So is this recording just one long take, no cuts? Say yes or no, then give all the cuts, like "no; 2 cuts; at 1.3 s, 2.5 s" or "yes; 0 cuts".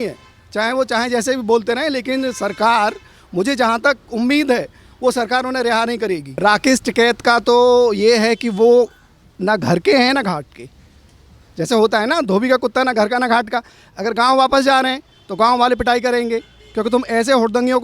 no; 1 cut; at 6.3 s